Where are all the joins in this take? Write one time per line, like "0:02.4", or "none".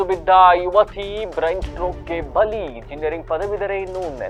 none